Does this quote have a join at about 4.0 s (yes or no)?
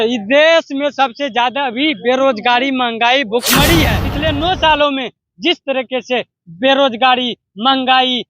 yes